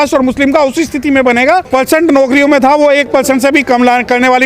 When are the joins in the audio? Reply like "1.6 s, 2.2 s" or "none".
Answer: 1.7 s